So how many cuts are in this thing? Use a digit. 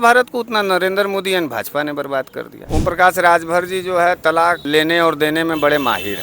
2